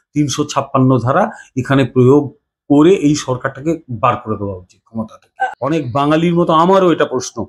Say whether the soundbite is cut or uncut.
cut